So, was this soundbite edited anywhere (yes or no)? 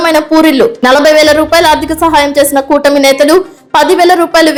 no